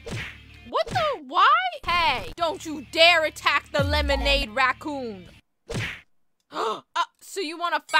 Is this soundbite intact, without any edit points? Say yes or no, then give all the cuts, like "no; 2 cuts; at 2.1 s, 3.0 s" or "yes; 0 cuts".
yes; 0 cuts